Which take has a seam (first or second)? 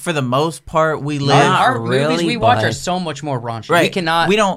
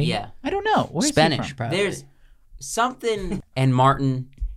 second